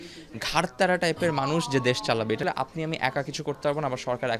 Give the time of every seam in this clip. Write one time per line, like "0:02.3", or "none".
0:02.4